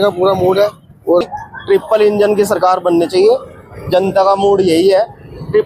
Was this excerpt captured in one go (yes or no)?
no